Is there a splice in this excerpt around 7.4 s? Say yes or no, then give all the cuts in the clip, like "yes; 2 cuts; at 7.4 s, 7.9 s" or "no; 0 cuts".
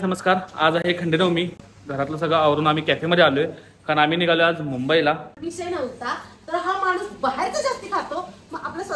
no; 2 cuts; at 1.6 s, 5.3 s